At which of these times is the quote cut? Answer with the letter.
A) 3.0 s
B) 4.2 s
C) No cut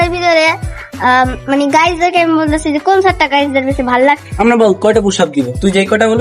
B